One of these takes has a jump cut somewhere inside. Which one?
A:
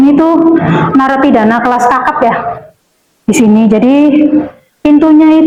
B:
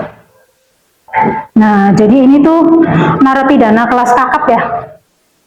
B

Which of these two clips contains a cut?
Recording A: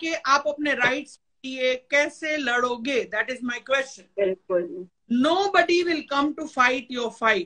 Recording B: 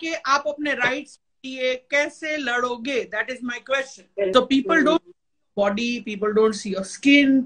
B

